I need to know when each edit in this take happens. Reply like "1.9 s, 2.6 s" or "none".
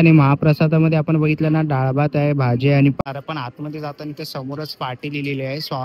3.0 s